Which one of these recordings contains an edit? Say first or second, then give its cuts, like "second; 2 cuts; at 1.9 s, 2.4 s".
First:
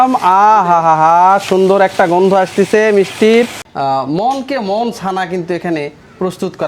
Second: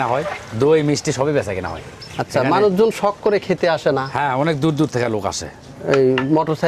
first; 1 cut; at 3.6 s